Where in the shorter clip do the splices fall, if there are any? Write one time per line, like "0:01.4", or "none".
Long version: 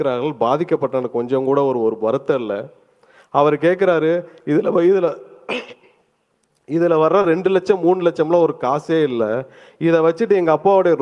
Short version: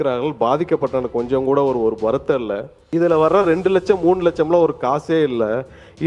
0:02.7